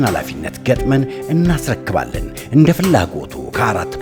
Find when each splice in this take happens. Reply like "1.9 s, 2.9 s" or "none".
none